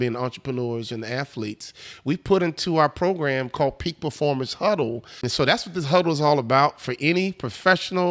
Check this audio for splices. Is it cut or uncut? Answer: cut